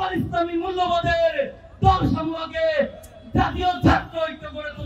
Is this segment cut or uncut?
uncut